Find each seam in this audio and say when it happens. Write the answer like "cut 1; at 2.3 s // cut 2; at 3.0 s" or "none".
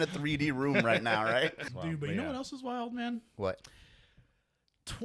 cut 1; at 1.6 s

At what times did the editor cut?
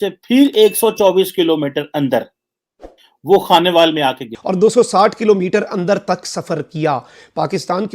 cut 1; at 4.3 s

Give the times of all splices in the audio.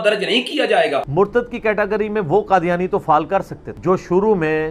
cut 1; at 1.1 s

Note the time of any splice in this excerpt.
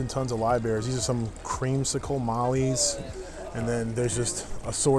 none

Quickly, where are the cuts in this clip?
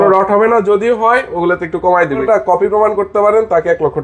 cut 1; at 2.2 s

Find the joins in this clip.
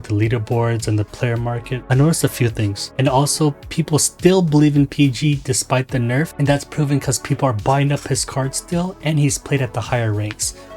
cut 1; at 2.9 s

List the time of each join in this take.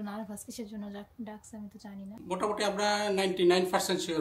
cut 1; at 2.1 s

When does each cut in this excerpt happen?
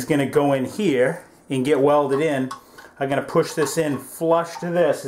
none

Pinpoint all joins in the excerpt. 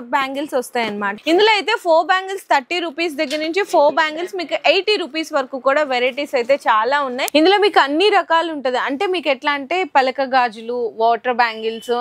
cut 1; at 1.1 s // cut 2; at 7.2 s

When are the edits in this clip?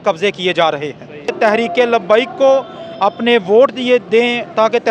cut 1; at 1.3 s

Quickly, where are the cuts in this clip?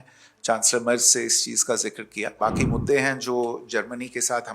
cut 1; at 2.3 s

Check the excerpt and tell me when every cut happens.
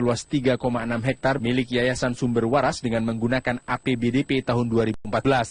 none

